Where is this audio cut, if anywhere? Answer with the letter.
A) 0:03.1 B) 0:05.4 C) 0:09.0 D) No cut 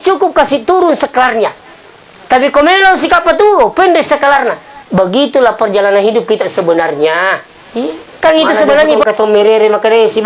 C